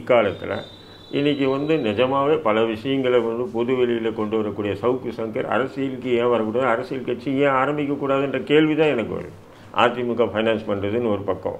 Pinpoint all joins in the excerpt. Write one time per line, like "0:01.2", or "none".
0:09.6